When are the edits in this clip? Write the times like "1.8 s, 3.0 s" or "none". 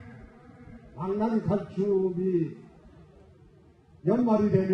1.3 s